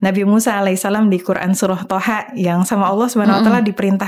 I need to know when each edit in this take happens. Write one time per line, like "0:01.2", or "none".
none